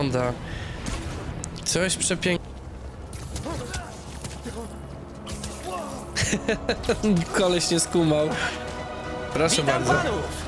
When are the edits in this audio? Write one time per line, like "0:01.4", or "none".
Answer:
0:02.4